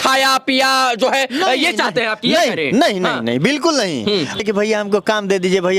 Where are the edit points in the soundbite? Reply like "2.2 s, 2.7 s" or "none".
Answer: 4.4 s